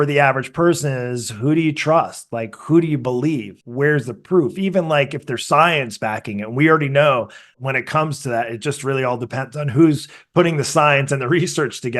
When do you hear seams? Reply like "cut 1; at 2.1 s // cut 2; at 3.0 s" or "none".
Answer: cut 1; at 3.6 s // cut 2; at 7.5 s

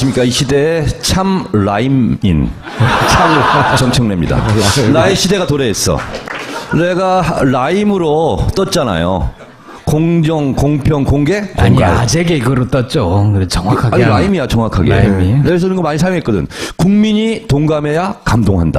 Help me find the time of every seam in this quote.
cut 1; at 17.7 s

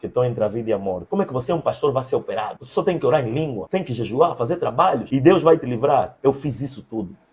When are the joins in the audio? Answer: cut 1; at 1.0 s // cut 2; at 2.6 s // cut 3; at 3.6 s // cut 4; at 5.0 s

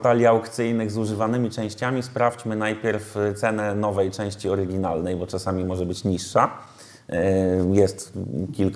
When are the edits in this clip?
none

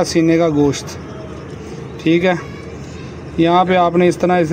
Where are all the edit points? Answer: none

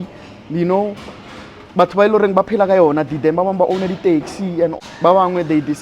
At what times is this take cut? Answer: cut 1; at 4.7 s

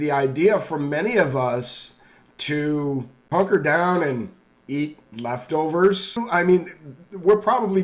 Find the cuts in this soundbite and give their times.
cut 1; at 3.2 s // cut 2; at 6.2 s

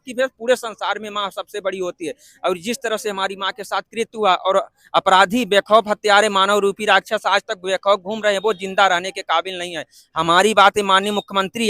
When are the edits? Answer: none

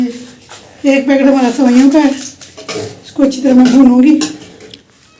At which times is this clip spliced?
none

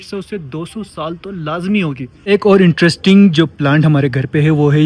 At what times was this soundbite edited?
cut 1; at 2.3 s

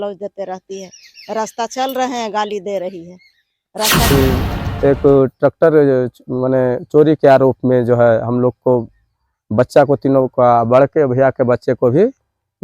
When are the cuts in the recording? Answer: cut 1; at 4.1 s

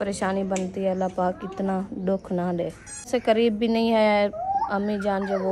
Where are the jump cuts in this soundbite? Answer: cut 1; at 3.1 s

